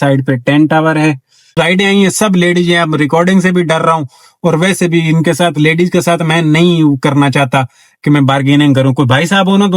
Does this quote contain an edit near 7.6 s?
no; 1 cut; at 1.4 s

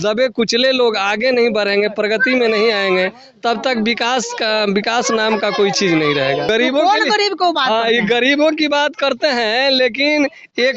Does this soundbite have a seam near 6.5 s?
yes; 1 cut; at 6.5 s

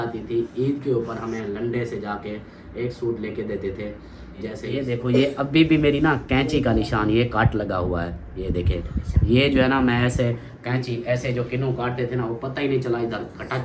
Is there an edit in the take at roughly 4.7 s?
yes; 1 cut; at 4.7 s

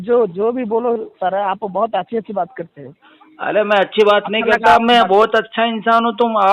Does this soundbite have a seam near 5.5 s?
no; 0 cuts

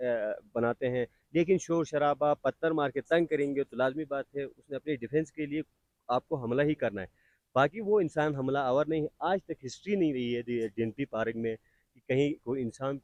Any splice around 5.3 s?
no; 0 cuts

